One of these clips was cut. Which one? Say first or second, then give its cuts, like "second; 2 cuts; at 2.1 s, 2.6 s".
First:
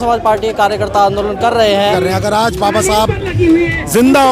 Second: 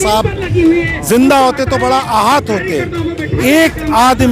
first; 1 cut; at 1.9 s